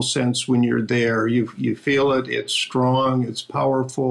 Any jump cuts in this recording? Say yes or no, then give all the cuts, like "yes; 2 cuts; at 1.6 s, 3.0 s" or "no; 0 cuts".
no; 0 cuts